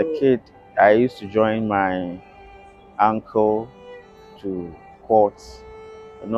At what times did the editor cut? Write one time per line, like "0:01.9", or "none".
none